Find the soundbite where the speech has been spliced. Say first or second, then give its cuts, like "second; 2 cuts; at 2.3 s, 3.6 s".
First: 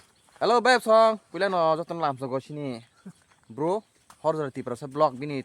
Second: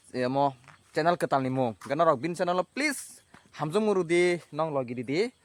first; 1 cut; at 4.0 s